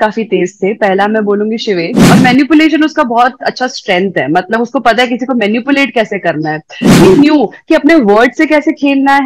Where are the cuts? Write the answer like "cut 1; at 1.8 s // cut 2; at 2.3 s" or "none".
cut 1; at 2.0 s // cut 2; at 7.0 s